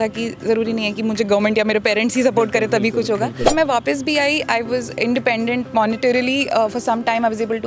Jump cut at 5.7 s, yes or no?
no